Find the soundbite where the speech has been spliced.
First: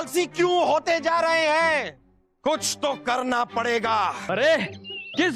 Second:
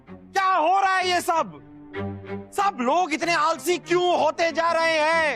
first; 1 cut; at 4.2 s

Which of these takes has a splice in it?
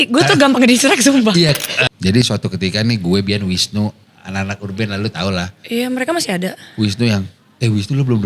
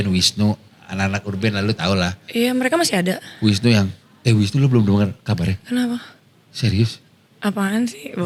first; 1 cut; at 1.8 s

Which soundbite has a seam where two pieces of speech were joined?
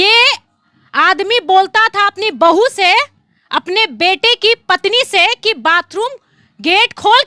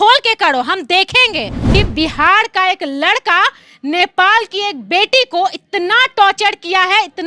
second; 1 cut; at 1.7 s

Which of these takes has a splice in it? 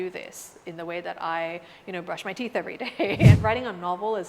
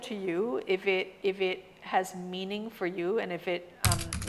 first; 1 cut; at 3.4 s

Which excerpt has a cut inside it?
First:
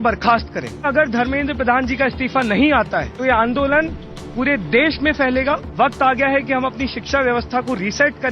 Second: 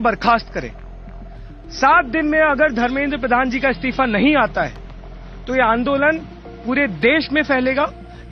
first; 3 cuts; at 0.9 s, 3.1 s, 5.7 s

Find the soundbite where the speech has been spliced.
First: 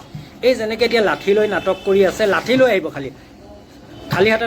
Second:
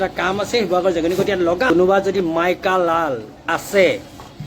second; 2 cuts; at 1.7 s, 3.3 s

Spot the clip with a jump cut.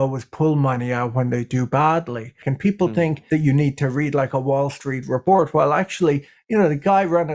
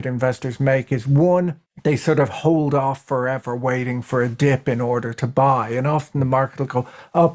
first; 1 cut; at 2.4 s

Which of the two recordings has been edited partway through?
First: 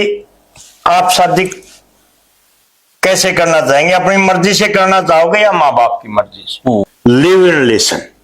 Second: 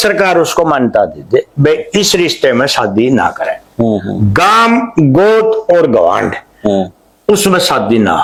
first; 1 cut; at 6.9 s

